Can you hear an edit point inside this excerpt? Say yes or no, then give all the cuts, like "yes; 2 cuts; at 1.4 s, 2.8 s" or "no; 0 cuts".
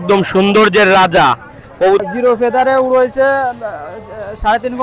yes; 1 cut; at 1.8 s